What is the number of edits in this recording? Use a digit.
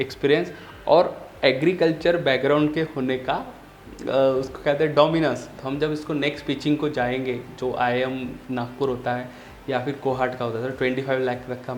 1